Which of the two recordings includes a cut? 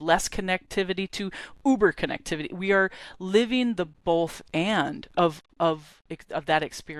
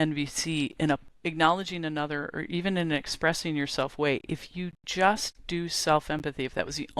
second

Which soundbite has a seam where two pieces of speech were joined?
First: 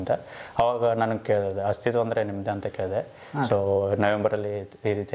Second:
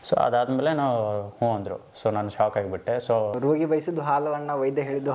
second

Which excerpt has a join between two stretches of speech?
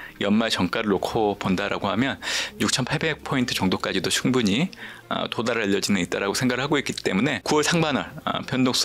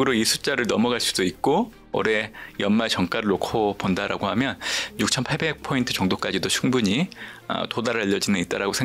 first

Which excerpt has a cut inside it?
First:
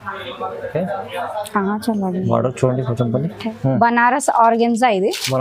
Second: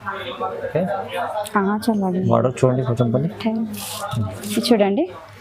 first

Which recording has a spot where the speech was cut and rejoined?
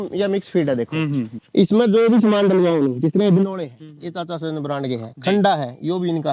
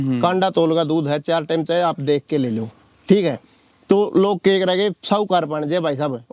first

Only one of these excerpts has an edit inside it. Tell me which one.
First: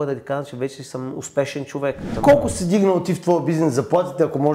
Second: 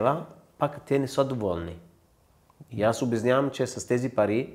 first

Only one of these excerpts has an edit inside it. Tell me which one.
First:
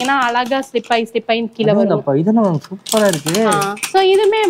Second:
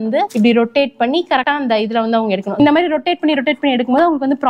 second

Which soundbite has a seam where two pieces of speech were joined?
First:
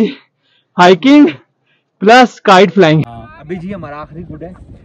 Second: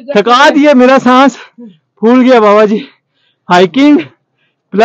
first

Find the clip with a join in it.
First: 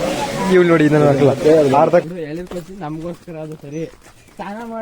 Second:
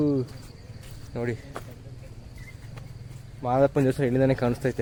first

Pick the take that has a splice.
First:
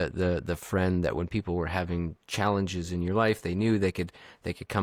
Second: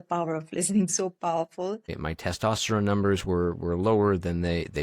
second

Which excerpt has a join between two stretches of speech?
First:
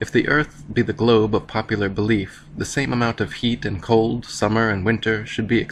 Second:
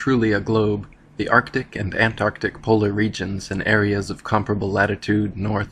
first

